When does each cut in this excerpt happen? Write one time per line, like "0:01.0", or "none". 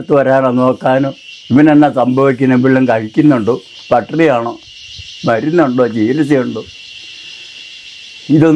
none